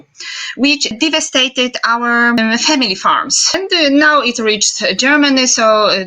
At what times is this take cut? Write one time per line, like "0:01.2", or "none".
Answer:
0:00.9
0:02.4
0:03.5